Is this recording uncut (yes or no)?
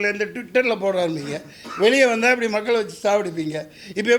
yes